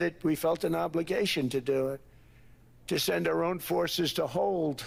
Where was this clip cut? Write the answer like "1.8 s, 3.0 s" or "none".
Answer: none